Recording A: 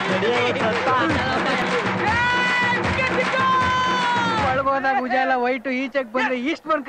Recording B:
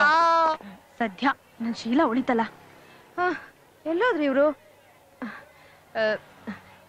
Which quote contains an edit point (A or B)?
A